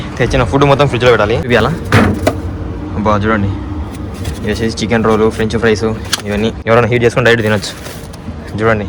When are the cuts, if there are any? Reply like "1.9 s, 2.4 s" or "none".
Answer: 1.5 s, 6.6 s